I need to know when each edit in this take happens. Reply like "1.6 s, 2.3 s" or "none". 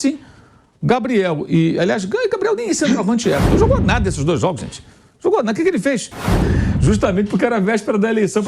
3.4 s, 6.3 s